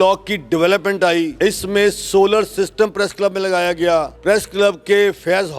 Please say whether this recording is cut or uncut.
cut